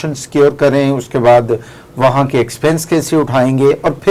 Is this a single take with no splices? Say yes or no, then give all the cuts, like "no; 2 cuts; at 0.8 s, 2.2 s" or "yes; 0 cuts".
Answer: yes; 0 cuts